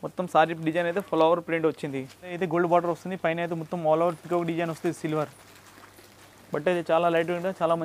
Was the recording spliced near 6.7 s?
no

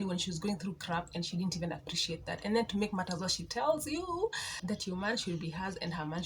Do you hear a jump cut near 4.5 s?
yes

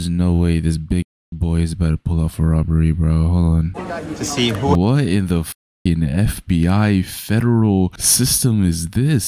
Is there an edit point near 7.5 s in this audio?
no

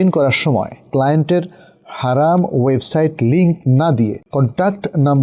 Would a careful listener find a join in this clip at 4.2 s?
yes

